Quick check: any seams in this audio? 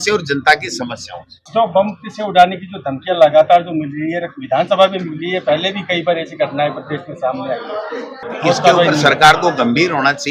no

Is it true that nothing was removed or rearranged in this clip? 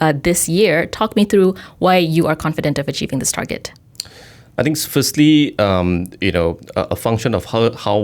yes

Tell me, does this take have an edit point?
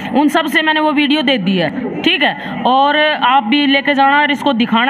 no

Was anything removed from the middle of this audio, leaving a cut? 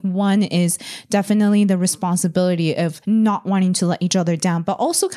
yes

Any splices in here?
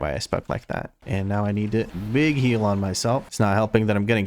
yes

